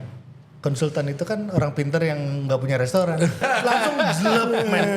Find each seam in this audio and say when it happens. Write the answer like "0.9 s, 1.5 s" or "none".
3.4 s